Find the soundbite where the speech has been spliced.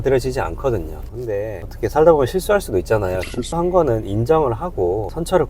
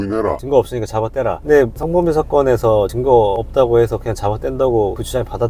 first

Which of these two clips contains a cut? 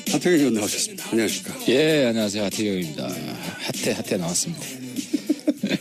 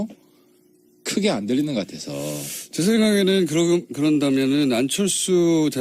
second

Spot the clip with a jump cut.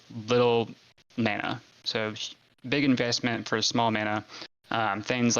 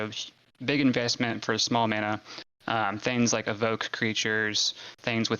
first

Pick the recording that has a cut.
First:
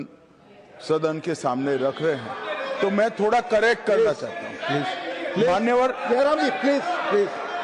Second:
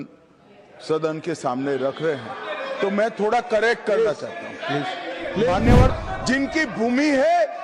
second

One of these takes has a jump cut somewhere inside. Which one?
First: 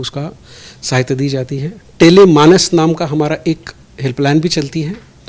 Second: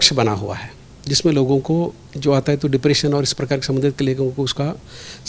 first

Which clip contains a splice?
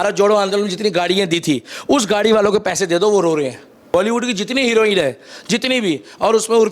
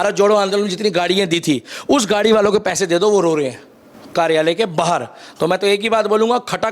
first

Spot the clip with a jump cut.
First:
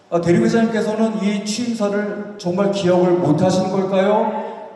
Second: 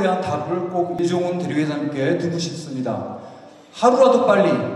second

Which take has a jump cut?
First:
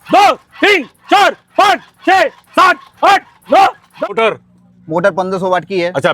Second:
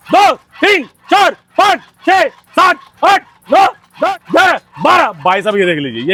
first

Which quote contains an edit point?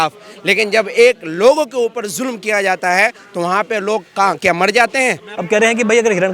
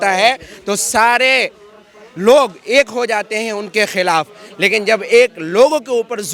first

